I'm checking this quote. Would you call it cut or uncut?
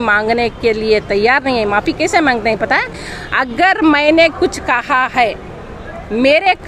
uncut